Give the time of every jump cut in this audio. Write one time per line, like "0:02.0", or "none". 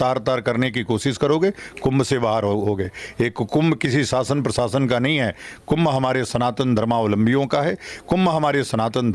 none

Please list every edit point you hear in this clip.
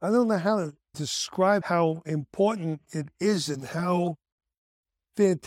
0:01.0

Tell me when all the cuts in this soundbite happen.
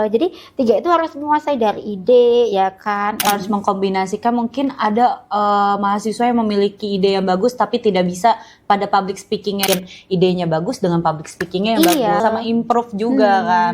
0:03.3
0:09.6
0:12.2

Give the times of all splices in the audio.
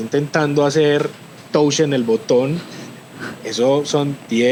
none

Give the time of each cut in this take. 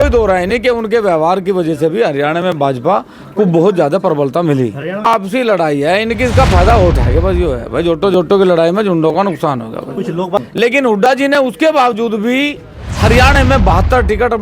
0:05.0
0:10.4

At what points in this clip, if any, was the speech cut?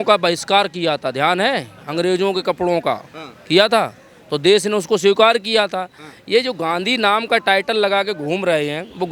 none

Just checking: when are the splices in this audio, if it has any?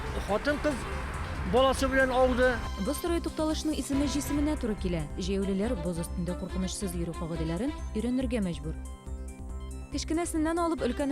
none

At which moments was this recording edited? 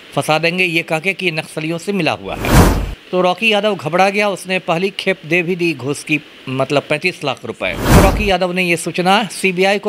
0:07.9

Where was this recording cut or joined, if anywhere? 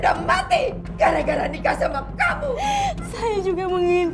0:02.6

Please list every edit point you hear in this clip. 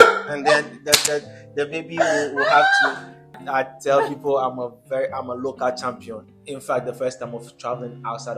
0:03.4
0:06.2

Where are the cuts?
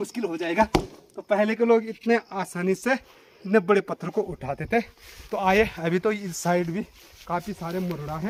none

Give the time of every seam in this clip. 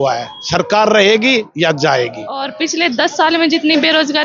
0:02.5

